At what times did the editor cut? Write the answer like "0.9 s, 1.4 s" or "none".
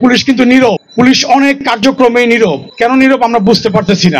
0.8 s, 2.7 s

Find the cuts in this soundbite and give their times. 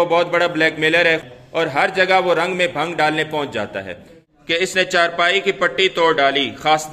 1.2 s, 4.6 s

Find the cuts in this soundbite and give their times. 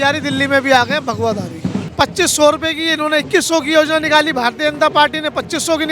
1.8 s

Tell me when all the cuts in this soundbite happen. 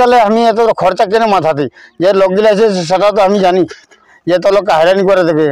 none

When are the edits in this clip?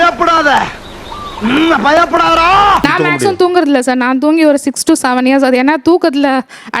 2.8 s, 5.7 s

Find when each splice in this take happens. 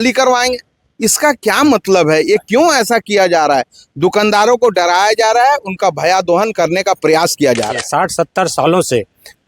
7.8 s

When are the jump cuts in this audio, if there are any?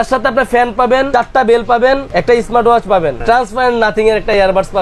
1.1 s, 2.1 s, 3.2 s

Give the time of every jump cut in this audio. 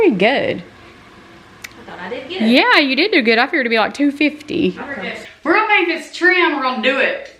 5.2 s

